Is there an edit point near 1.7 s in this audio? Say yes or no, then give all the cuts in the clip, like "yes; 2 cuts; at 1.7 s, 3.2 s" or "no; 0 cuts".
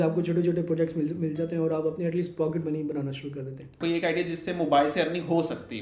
no; 1 cut; at 3.8 s